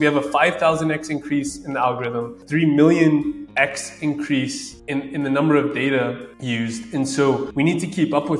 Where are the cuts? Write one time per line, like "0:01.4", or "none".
0:07.5